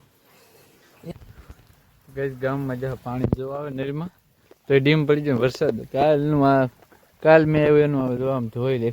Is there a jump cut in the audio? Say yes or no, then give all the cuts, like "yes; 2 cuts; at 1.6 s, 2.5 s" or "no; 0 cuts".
yes; 1 cut; at 1.1 s